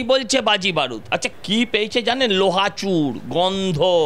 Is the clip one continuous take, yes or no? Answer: no